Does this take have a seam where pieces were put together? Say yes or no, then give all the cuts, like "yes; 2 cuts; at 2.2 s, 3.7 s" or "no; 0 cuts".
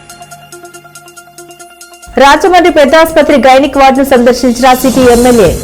yes; 1 cut; at 1.1 s